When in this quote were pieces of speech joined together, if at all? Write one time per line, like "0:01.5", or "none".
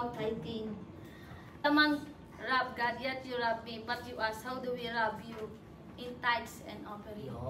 0:01.6